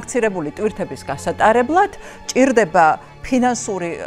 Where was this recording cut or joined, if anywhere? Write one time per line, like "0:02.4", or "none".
none